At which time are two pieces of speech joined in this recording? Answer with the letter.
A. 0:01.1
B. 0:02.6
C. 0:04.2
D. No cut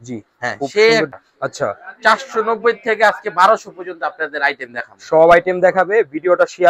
A